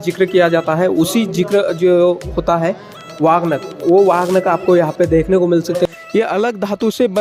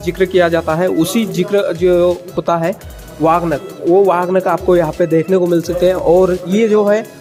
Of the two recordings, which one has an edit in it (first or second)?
first